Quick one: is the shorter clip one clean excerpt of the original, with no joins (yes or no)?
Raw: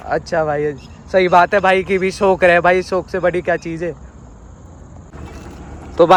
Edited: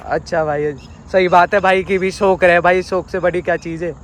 yes